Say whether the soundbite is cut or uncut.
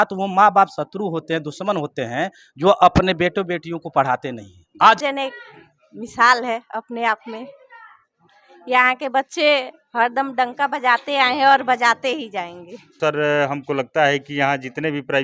cut